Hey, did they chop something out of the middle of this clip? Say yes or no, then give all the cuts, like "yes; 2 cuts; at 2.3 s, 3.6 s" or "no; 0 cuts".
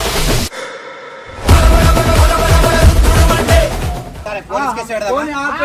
yes; 1 cut; at 4.3 s